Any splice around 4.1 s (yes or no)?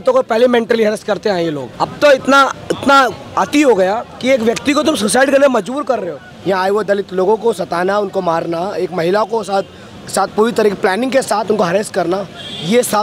yes